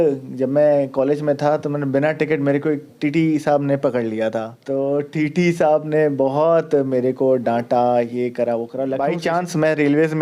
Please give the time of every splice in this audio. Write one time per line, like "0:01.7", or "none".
0:04.6
0:08.9